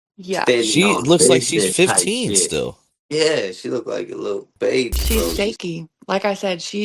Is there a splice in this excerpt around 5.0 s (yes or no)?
yes